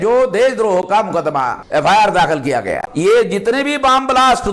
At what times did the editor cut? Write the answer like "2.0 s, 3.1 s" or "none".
1.6 s, 2.9 s